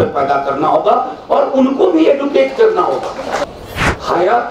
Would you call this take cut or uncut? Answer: cut